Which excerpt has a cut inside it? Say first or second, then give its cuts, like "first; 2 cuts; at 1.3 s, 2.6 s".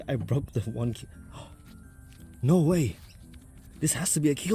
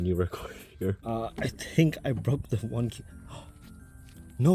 second; 1 cut; at 1.0 s